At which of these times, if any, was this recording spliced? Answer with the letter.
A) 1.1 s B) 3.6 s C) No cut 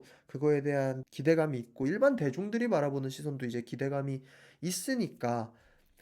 A